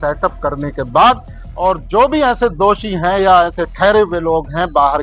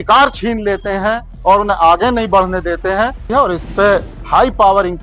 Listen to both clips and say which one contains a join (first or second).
second